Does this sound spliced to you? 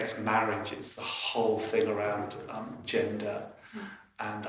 no; 0 cuts

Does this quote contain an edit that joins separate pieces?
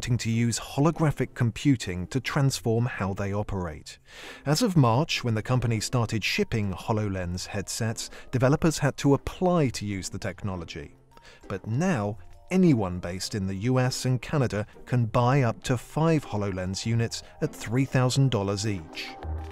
yes; 1 cut; at 4.7 s

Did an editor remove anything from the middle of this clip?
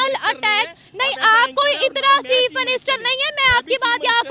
no; 0 cuts

